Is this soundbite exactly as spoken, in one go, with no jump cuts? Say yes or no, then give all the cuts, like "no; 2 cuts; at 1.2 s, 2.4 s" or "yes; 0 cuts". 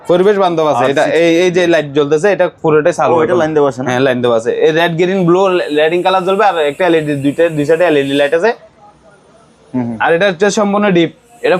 yes; 0 cuts